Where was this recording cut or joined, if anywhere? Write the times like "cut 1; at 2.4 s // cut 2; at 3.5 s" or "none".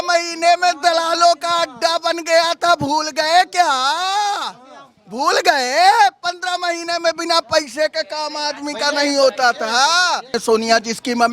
cut 1; at 10.4 s

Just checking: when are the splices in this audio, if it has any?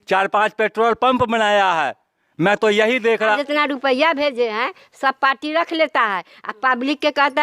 cut 1; at 3.4 s

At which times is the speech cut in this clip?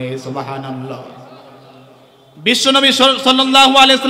none

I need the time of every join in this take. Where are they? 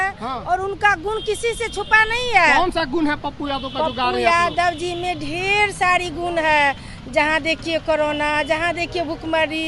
none

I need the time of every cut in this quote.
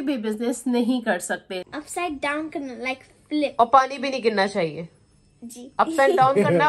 cut 1; at 1.6 s

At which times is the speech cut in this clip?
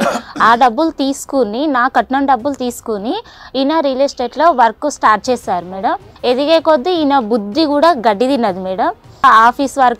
cut 1; at 6.1 s // cut 2; at 9.2 s

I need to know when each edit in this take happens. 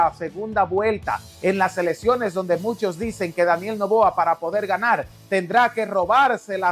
none

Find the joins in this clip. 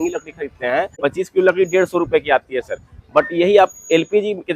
cut 1; at 0.9 s

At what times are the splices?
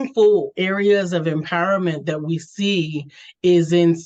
none

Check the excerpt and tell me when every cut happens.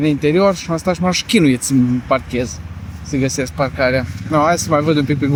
none

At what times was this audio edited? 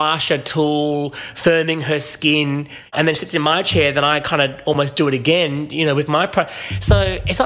cut 1; at 2.9 s

